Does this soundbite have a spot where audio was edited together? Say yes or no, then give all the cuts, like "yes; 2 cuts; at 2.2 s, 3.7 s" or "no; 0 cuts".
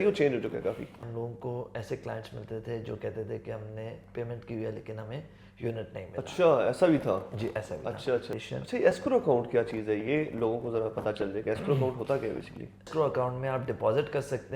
yes; 3 cuts; at 1.0 s, 8.4 s, 12.9 s